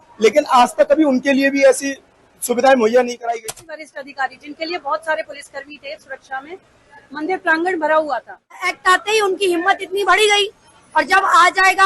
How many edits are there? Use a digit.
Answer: 2